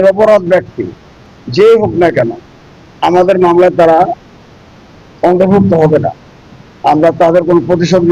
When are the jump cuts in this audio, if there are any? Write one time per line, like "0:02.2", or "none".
none